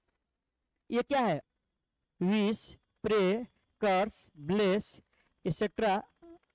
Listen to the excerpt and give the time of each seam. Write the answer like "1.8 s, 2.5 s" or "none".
1.4 s